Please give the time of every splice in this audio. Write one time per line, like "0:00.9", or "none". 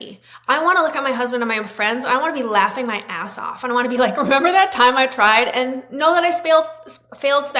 none